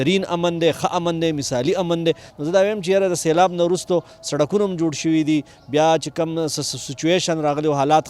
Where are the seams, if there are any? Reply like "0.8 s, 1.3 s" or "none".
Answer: 2.3 s